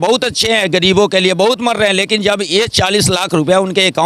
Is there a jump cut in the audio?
no; 0 cuts

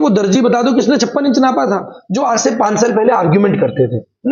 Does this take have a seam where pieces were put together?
yes; 1 cut; at 2.0 s

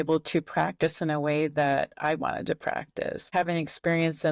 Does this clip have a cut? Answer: yes; 1 cut; at 3.3 s

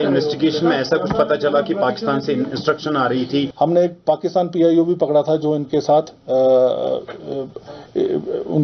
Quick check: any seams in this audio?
yes; 1 cut; at 3.5 s

